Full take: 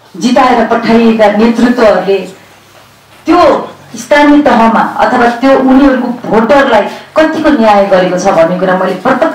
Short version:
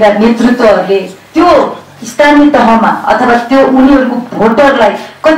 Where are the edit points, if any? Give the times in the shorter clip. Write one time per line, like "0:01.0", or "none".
0:01.2

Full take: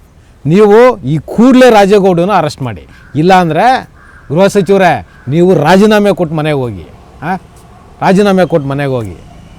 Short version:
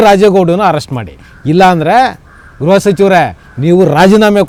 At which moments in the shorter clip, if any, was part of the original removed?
none

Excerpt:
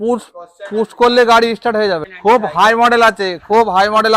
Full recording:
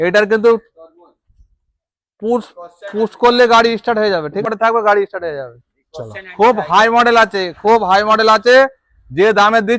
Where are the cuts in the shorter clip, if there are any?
0:02.1

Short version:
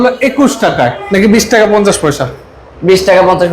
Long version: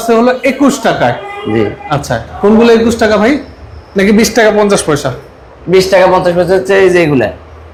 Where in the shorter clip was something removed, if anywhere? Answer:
0:01.0

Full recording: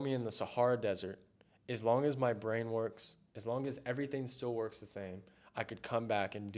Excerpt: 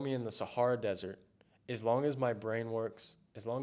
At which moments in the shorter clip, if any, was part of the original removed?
none

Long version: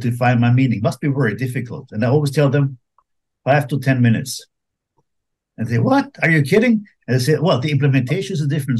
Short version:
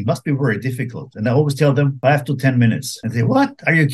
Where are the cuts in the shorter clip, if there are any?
0:01.9
0:02.9

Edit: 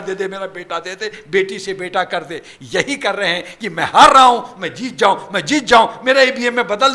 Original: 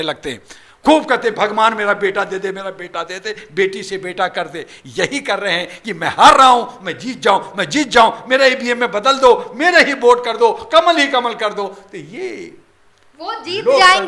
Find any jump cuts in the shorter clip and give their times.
none

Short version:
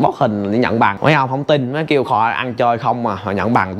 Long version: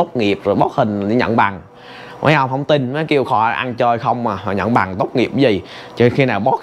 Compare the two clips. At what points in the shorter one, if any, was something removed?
0:01.0

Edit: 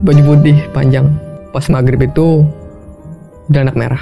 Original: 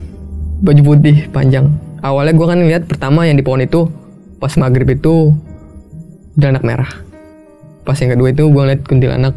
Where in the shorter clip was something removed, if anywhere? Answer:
0:01.3

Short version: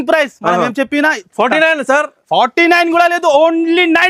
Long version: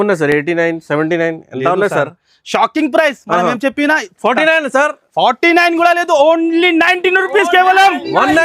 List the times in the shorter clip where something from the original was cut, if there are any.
none

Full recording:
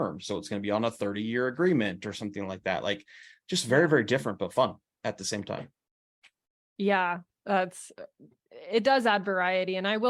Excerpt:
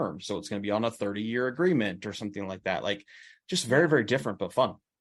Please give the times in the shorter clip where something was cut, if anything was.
none

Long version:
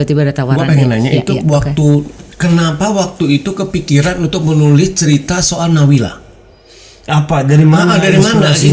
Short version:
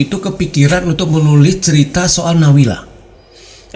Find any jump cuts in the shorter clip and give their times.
none

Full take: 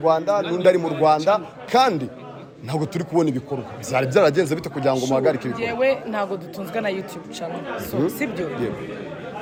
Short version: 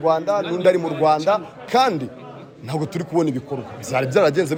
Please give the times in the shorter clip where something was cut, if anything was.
none

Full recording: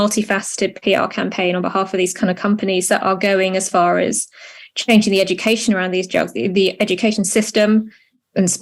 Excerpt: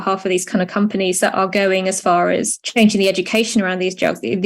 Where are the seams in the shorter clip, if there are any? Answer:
0:02.6

